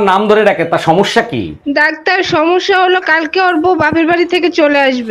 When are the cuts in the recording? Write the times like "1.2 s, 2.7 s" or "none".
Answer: none